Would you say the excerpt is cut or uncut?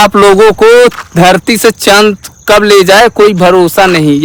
uncut